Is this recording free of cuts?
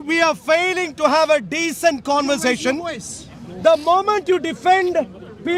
yes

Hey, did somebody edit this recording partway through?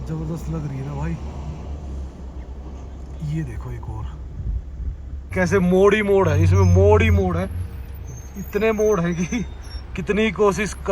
yes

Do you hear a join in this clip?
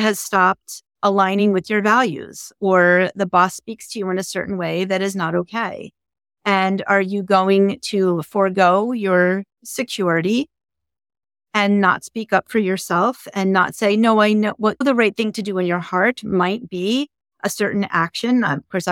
no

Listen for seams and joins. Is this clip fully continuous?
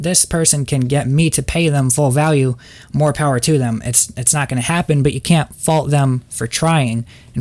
yes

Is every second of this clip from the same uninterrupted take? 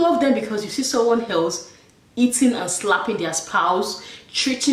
yes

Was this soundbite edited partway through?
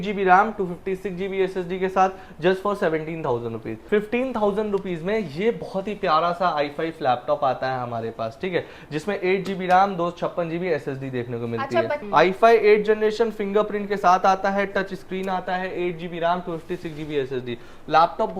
yes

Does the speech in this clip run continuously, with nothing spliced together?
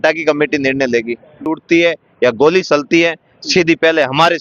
no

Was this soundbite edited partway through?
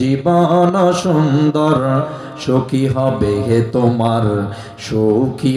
no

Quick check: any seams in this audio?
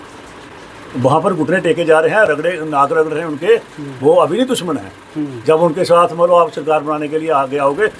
no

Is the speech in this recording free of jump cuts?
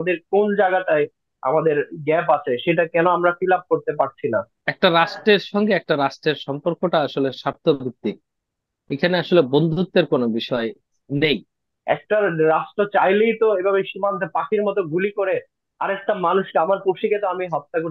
no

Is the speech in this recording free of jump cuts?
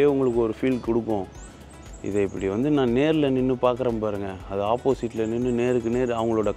yes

